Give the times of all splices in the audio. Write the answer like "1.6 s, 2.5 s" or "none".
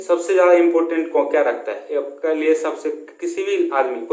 none